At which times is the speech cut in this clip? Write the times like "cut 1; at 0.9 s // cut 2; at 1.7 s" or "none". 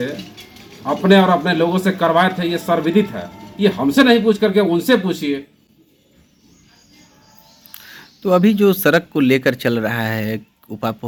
none